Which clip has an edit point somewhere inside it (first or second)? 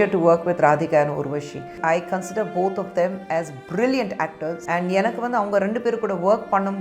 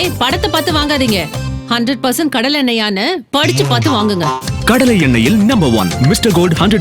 first